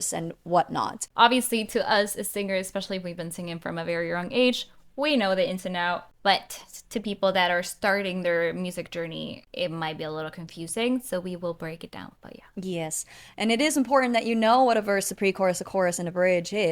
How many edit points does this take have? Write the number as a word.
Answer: three